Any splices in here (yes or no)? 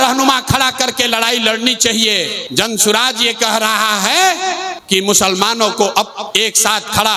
yes